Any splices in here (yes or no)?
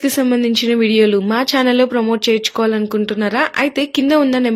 no